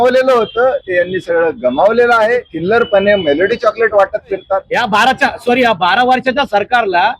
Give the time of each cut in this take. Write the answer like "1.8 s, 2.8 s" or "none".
2.5 s, 4.7 s